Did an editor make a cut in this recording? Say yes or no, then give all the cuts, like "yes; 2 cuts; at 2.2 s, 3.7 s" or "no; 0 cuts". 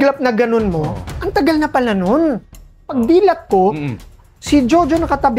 yes; 1 cut; at 2.7 s